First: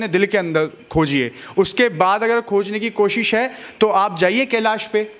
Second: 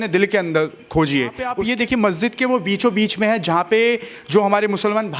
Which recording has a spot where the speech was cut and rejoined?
second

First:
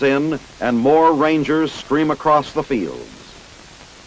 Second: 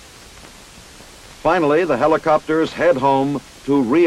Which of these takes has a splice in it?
second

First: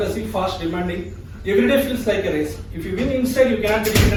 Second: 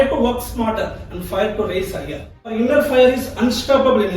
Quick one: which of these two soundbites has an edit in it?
second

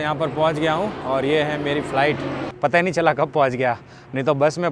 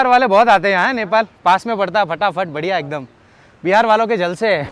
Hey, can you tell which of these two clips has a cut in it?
first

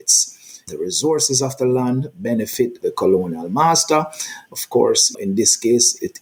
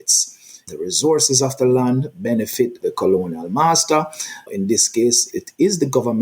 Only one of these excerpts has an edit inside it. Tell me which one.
second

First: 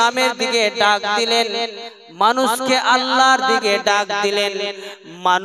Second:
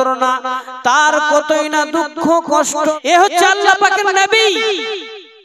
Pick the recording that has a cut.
second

